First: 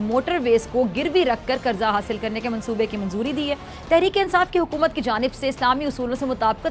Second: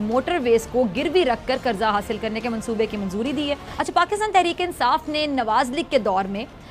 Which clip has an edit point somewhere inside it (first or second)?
second